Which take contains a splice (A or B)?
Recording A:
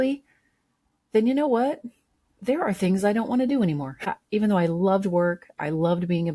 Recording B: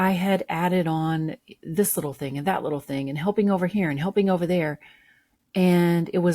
A